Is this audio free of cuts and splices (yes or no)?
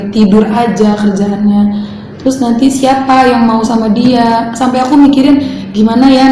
yes